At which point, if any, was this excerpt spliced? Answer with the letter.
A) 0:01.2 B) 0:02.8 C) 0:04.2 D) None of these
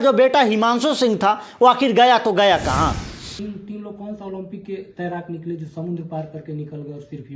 B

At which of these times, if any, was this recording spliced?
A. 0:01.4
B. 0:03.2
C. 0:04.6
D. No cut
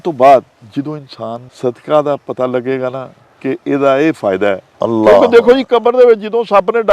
A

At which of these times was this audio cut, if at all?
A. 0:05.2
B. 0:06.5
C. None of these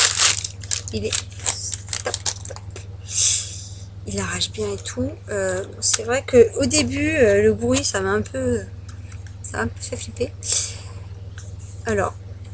B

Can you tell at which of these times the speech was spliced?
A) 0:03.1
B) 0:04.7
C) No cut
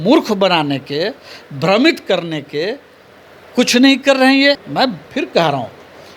B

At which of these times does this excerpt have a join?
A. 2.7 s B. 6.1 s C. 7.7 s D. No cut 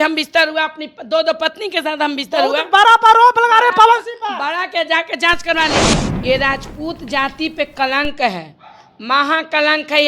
B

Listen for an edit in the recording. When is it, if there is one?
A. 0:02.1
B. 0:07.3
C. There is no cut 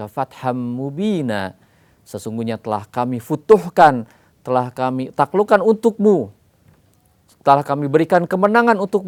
C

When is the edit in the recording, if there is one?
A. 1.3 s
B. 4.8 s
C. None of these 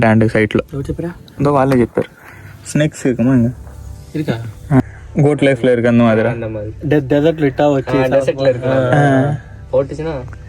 B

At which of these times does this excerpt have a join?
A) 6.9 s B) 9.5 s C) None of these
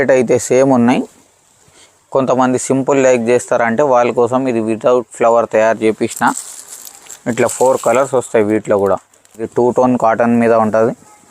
B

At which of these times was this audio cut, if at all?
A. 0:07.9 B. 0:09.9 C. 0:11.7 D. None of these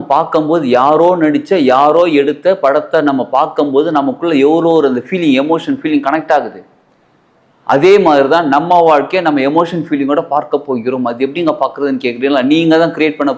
D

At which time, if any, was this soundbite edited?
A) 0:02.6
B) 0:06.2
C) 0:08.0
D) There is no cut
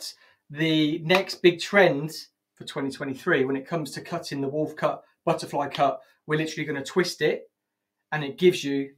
D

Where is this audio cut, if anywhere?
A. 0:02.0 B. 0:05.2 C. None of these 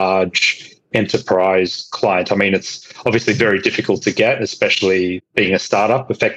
B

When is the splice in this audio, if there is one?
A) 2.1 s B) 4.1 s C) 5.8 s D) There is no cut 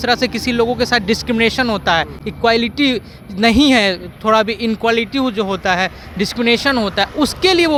D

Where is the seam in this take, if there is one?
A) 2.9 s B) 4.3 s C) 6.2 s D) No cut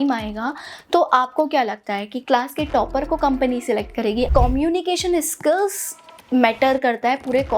B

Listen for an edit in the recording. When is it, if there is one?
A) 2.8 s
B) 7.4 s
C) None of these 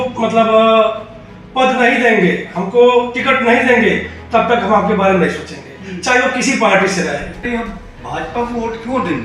B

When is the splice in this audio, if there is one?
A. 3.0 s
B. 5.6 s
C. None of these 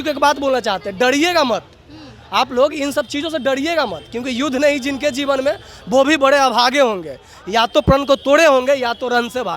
C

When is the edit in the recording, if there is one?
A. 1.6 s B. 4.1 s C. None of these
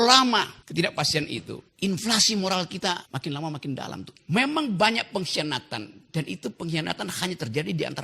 B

